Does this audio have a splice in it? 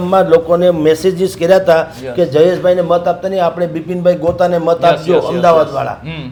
no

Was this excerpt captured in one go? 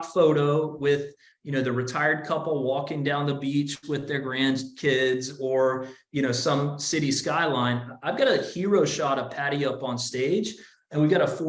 yes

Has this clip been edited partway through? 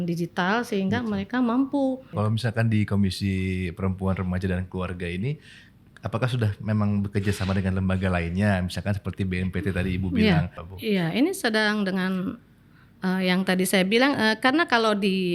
yes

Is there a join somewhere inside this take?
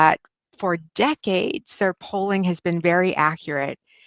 no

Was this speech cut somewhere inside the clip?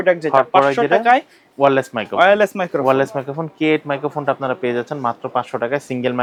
no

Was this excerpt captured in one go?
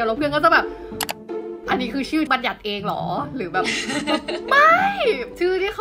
no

